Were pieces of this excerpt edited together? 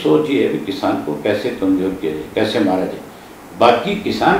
no; 0 cuts

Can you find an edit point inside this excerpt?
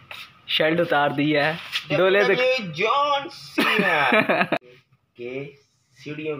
yes; 1 cut; at 4.6 s

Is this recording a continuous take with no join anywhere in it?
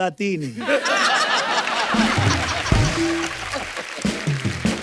yes; 0 cuts

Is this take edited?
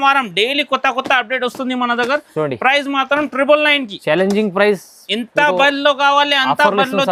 no; 0 cuts

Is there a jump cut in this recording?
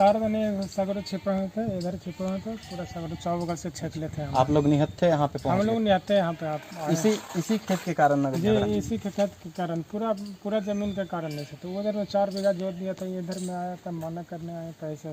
no; 0 cuts

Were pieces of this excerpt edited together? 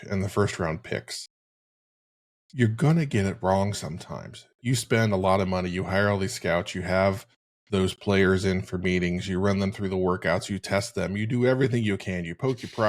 no; 0 cuts

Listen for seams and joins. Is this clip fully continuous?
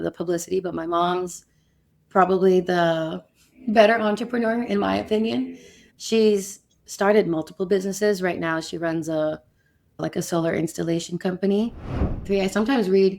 no; 1 cut; at 12.2 s

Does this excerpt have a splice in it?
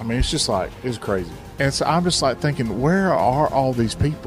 yes; 1 cut; at 1.4 s

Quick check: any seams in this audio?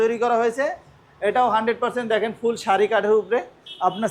no; 0 cuts

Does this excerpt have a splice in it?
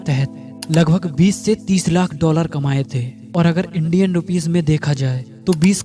no; 0 cuts

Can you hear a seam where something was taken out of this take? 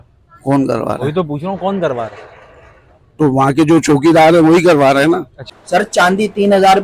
yes; 1 cut; at 5.4 s

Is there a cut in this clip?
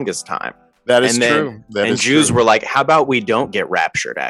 no; 0 cuts

